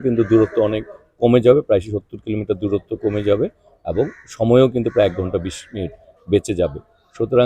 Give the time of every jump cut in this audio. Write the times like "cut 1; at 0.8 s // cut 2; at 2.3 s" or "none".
none